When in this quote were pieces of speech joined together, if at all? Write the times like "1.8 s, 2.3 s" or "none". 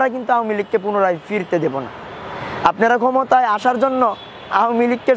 none